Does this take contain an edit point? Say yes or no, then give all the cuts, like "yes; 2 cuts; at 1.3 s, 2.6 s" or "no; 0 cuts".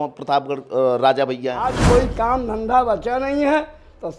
yes; 1 cut; at 1.8 s